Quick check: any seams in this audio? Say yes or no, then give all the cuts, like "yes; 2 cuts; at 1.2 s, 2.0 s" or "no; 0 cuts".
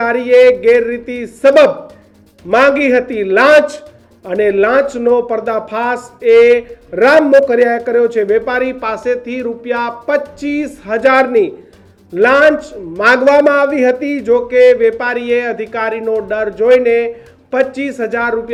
no; 0 cuts